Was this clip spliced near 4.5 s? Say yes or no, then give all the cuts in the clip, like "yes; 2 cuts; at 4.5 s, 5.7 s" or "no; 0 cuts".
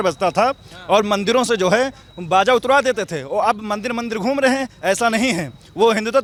no; 0 cuts